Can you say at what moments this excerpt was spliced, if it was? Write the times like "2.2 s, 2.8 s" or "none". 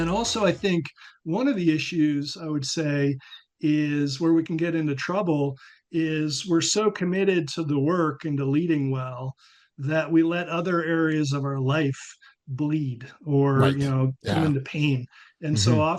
none